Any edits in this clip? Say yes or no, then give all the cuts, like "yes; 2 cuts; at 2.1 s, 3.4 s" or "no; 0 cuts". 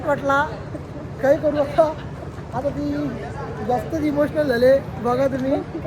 no; 0 cuts